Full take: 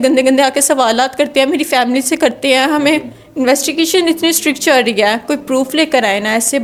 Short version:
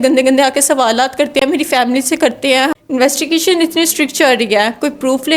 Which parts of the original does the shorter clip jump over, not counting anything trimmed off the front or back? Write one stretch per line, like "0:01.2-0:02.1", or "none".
0:02.7-0:03.2